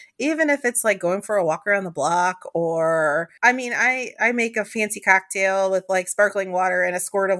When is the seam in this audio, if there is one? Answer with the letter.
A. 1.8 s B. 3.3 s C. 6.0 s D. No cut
B